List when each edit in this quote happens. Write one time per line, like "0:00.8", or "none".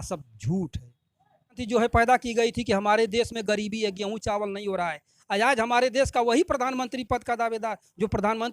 0:01.6